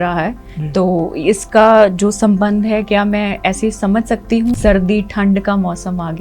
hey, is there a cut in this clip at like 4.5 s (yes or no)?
yes